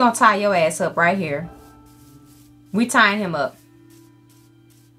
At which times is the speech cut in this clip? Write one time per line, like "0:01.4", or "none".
none